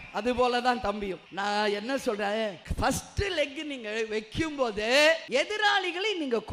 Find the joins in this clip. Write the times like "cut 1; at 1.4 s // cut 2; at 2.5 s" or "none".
cut 1; at 1.2 s // cut 2; at 2.6 s // cut 3; at 5.2 s

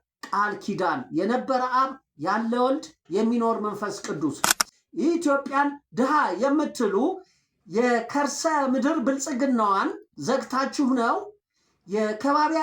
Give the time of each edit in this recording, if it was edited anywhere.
cut 1; at 4.6 s

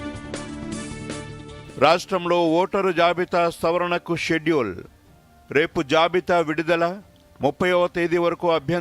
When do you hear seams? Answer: cut 1; at 1.6 s

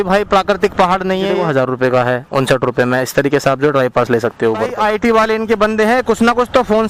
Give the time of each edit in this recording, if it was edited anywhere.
cut 1; at 1.3 s // cut 2; at 4.7 s

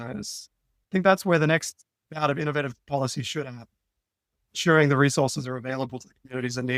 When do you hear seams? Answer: none

